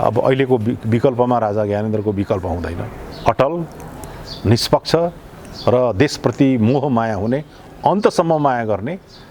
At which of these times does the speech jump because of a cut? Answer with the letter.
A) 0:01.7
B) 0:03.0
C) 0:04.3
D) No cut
B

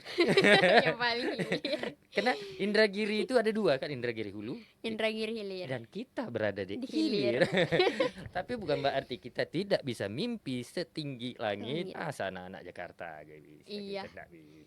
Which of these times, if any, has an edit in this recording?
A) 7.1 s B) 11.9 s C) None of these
B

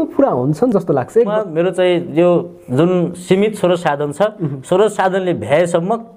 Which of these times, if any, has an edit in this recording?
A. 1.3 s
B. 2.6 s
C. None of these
A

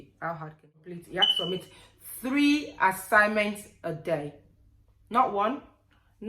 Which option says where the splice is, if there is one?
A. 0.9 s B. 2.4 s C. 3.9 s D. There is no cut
A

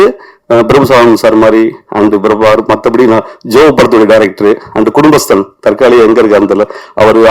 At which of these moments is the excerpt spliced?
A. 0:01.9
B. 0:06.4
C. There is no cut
C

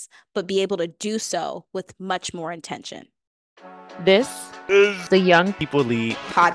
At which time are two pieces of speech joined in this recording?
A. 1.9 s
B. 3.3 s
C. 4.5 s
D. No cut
B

